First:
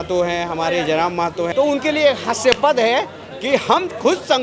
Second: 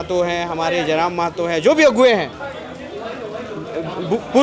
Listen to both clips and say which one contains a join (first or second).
first